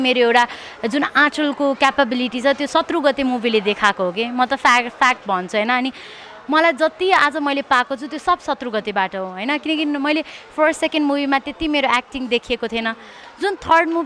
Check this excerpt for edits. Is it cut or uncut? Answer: uncut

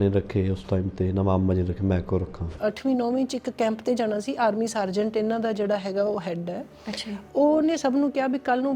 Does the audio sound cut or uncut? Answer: cut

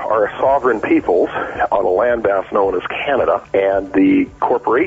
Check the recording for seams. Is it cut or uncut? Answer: cut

